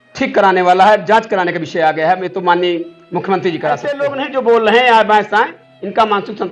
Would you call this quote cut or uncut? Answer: cut